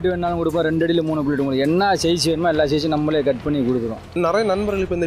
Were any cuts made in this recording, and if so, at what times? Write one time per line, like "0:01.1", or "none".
0:04.2